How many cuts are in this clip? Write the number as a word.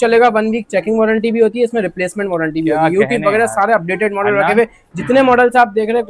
zero